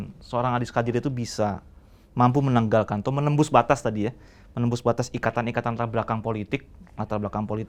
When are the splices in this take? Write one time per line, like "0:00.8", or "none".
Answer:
none